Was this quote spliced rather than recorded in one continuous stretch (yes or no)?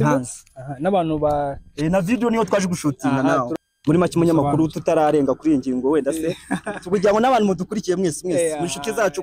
yes